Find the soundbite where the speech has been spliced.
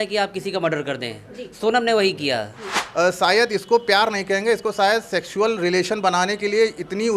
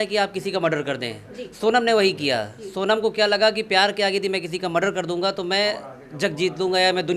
first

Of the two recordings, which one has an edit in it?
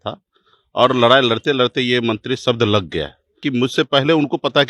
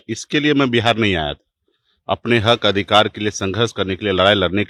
first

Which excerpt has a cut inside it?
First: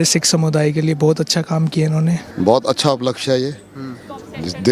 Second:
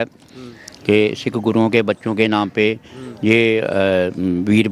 first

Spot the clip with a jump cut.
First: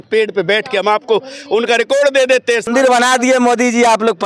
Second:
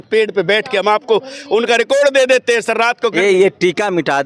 first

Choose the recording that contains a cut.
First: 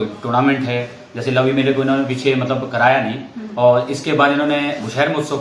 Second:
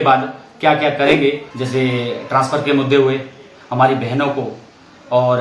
second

